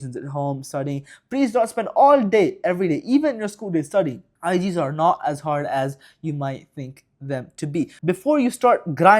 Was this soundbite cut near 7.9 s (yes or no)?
yes